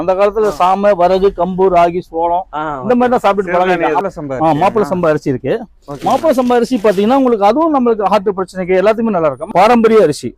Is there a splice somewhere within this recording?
yes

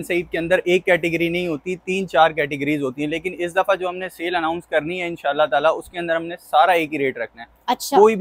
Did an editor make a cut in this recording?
no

